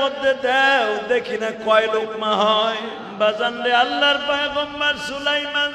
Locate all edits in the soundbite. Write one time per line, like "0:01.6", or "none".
0:03.0